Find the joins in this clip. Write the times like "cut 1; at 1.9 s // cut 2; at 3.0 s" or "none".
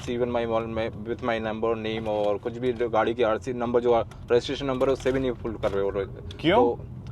none